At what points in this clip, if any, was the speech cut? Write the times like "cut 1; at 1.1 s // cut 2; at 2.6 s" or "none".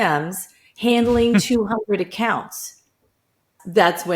none